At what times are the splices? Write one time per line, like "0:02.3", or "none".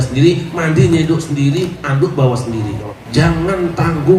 0:02.9